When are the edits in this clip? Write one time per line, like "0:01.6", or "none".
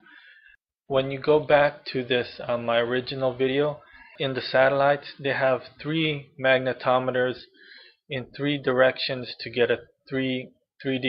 0:06.3